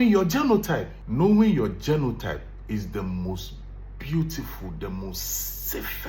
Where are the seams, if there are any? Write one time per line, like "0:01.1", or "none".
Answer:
0:01.0